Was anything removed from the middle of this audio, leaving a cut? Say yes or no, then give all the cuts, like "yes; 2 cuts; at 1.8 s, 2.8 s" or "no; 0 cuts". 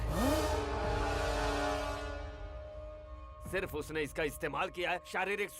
no; 0 cuts